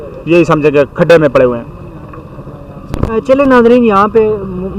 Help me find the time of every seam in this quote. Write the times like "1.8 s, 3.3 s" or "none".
none